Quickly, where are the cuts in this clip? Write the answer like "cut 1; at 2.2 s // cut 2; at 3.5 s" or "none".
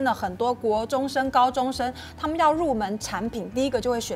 none

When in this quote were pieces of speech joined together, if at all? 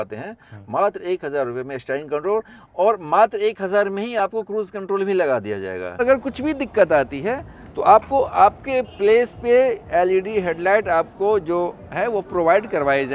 cut 1; at 6.0 s

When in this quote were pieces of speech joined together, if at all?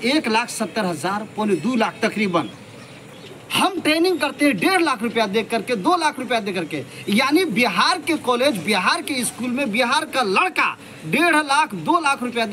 cut 1; at 3.1 s

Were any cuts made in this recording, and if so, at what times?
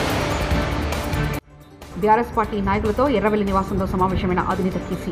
none

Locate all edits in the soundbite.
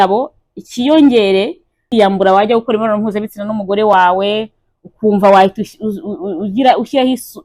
cut 1; at 1.9 s

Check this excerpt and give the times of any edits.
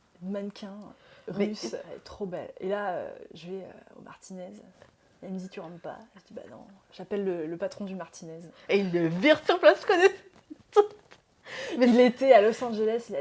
cut 1; at 1.9 s

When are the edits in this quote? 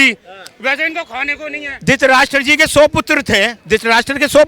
cut 1; at 3.6 s

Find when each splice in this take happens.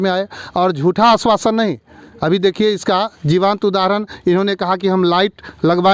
none

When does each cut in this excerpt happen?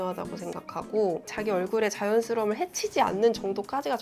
none

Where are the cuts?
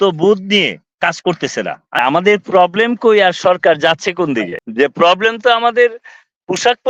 cut 1; at 2.0 s // cut 2; at 4.6 s

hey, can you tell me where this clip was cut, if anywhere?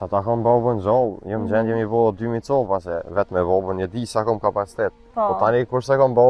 none

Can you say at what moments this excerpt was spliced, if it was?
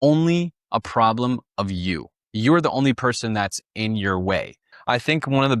cut 1; at 1.7 s // cut 2; at 4.7 s

